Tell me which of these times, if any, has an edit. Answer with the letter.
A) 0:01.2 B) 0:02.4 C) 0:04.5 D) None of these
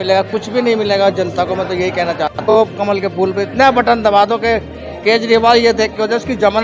B